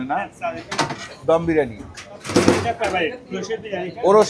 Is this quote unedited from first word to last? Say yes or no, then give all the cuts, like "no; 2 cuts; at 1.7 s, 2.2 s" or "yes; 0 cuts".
no; 1 cut; at 2.2 s